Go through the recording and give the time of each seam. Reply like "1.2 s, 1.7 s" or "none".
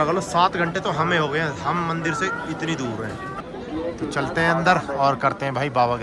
3.4 s